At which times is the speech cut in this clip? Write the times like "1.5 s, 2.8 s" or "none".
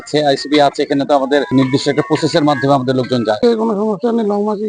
3.4 s